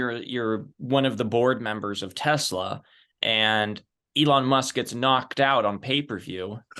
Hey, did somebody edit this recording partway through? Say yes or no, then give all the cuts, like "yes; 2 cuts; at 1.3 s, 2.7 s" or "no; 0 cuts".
no; 0 cuts